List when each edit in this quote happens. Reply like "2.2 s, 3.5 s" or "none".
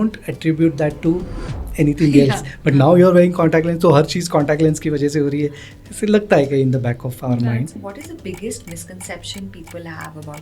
7.8 s